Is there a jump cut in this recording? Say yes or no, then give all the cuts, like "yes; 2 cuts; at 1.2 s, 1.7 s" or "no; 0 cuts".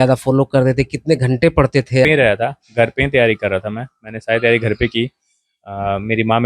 yes; 1 cut; at 2.1 s